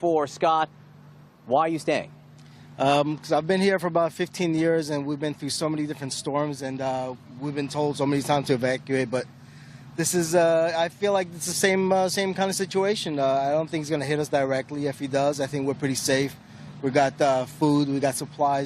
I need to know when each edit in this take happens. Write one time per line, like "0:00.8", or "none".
0:09.1

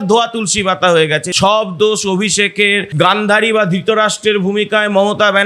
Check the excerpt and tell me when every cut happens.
0:01.3

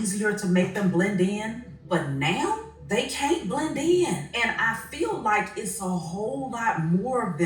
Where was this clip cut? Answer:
0:01.7
0:02.7
0:04.3

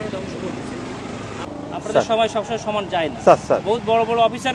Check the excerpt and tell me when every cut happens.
0:01.5

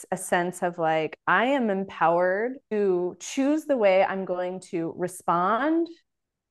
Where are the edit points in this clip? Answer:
0:02.7

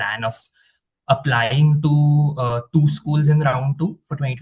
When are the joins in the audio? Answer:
none

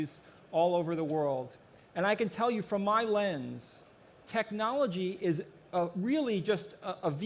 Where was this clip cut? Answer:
none

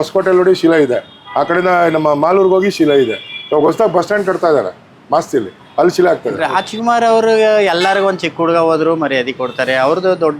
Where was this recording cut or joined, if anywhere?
0:06.3

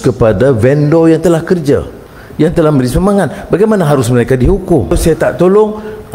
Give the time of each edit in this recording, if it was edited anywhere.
0:02.0
0:05.0

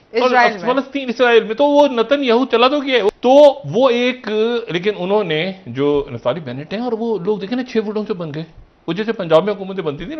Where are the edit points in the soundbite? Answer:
none

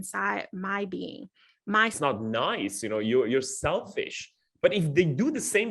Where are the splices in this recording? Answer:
0:02.0

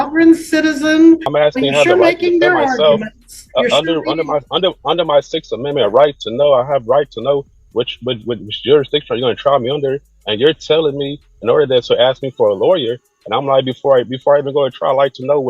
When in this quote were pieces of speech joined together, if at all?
0:01.3

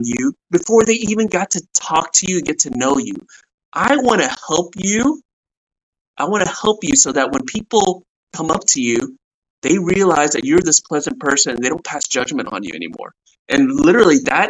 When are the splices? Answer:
none

